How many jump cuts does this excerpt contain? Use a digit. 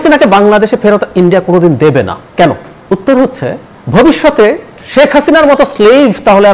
0